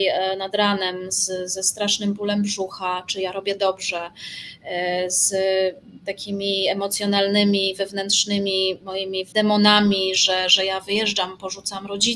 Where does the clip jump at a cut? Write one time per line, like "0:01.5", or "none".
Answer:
0:09.3